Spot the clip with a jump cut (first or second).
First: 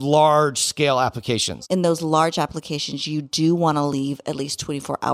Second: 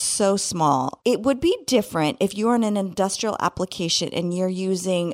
first